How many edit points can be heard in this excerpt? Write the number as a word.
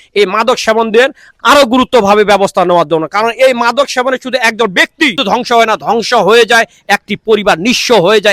two